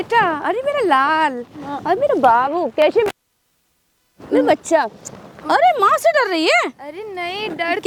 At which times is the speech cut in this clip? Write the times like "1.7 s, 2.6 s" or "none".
none